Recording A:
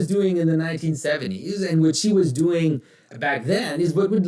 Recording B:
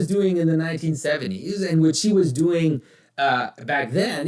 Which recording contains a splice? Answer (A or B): A